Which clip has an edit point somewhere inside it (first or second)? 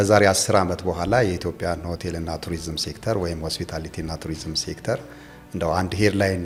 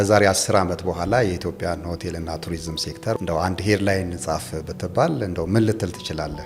second